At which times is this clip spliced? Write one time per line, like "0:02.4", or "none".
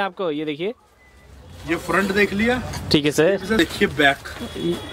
0:03.6